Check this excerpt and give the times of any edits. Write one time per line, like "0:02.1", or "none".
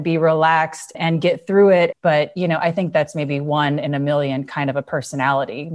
0:00.9
0:01.9